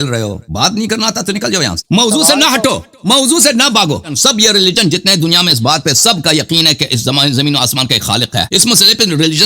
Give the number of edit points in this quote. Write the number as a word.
three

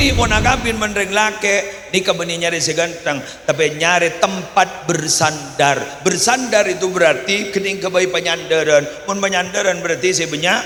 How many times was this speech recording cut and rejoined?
zero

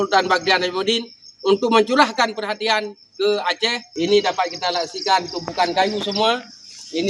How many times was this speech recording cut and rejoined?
one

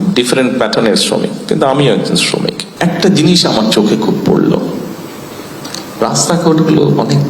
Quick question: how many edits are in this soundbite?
one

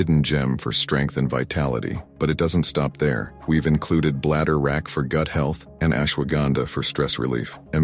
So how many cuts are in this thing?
zero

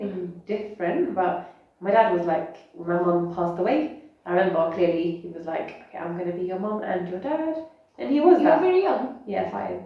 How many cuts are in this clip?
zero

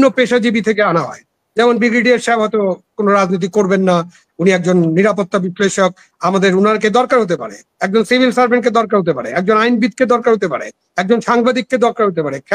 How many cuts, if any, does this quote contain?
zero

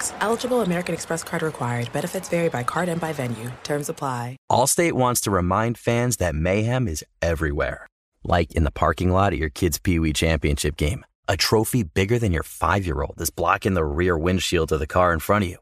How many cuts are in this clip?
one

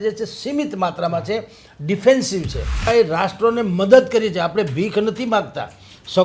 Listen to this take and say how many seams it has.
one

